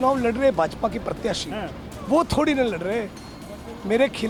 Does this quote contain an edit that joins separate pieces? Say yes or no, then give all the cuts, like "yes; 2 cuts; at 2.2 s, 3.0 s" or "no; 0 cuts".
no; 0 cuts